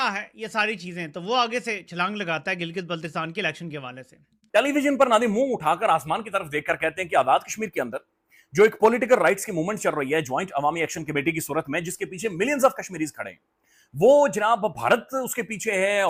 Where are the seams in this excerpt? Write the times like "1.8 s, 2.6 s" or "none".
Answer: none